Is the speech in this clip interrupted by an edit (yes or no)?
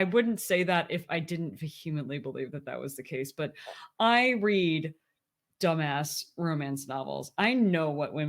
no